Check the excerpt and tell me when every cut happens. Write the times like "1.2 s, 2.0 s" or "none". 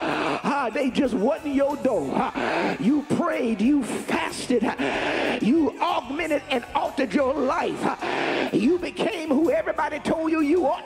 none